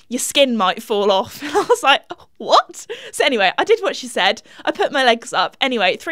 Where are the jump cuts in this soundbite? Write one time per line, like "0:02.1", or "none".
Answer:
none